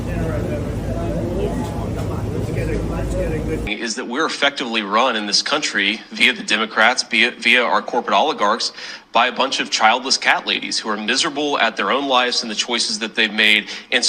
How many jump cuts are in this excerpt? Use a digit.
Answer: 1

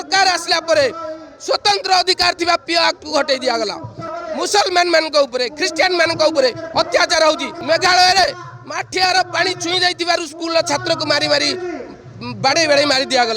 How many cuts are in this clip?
2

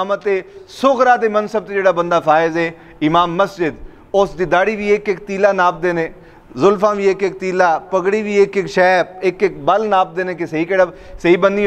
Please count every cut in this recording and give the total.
0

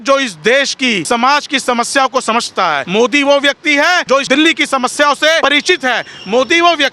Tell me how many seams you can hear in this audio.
4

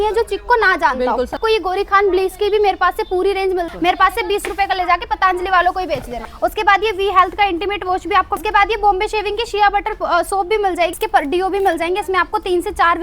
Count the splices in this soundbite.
5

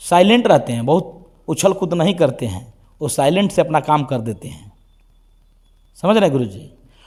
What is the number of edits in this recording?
0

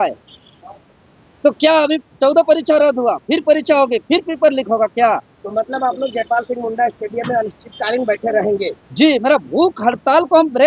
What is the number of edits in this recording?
1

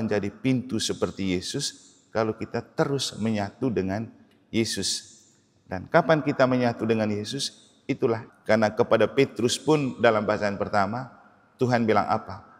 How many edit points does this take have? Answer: 1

